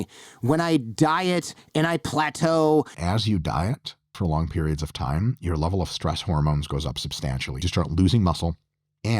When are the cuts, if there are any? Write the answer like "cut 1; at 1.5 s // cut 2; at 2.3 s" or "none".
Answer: cut 1; at 3.0 s // cut 2; at 4.2 s // cut 3; at 7.6 s

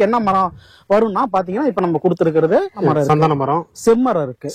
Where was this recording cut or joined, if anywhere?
cut 1; at 2.9 s

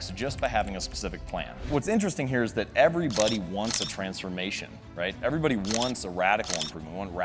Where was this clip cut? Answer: cut 1; at 1.6 s

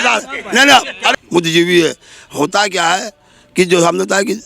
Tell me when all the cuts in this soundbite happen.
cut 1; at 1.1 s

